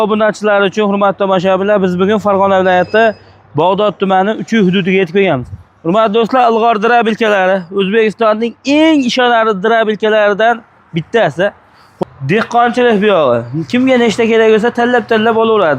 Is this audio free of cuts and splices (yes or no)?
no